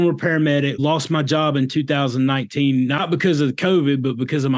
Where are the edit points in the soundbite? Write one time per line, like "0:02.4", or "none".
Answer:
0:00.7
0:03.0